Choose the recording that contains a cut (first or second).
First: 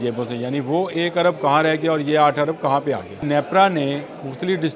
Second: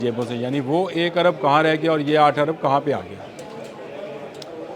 first